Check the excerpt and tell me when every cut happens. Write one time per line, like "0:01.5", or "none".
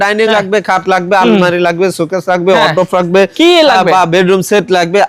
none